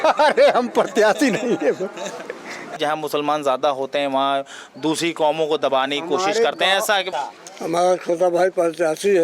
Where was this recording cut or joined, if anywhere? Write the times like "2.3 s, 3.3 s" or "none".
2.8 s, 7.1 s